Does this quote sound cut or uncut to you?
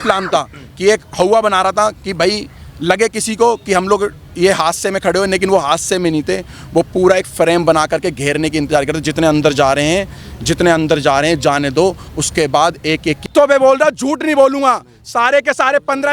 cut